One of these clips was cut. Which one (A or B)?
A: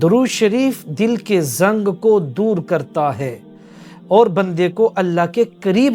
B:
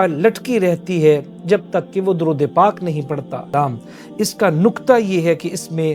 B